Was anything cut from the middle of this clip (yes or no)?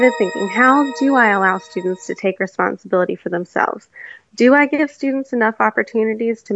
no